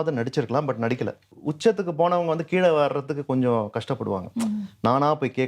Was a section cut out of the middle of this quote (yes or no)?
yes